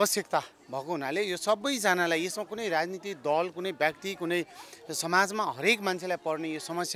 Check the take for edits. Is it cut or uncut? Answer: uncut